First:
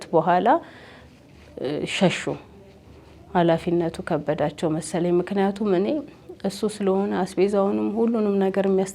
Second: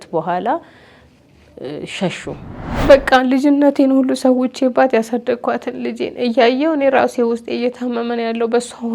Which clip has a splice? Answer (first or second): second